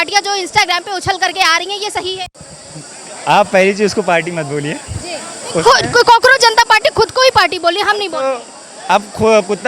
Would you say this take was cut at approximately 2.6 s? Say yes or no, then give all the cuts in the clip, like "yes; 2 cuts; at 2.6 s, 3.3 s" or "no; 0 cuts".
no; 0 cuts